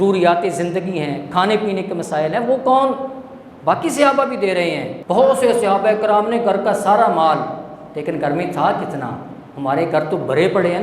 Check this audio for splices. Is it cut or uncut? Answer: cut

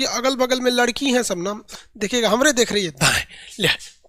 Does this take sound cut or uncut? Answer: cut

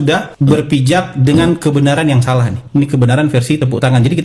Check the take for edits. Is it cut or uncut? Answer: uncut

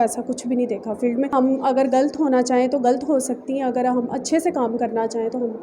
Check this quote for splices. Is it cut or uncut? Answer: cut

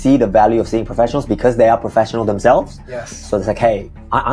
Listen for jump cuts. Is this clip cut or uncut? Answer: uncut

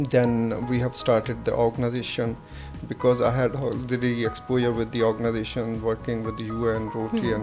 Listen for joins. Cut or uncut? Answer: uncut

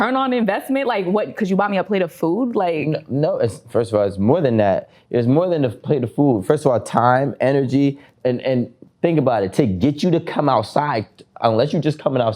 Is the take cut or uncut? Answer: uncut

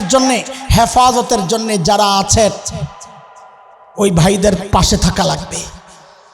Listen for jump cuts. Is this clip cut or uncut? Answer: uncut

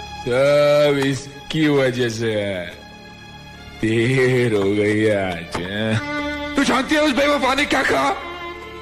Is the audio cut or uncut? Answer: cut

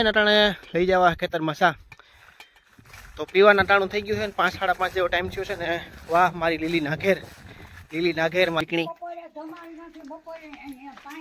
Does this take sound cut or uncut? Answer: cut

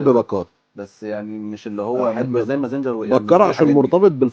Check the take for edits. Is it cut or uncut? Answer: uncut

